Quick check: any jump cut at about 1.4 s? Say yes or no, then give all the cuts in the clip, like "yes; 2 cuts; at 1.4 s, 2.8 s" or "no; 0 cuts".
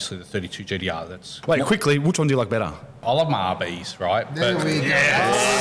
yes; 2 cuts; at 1.4 s, 3.0 s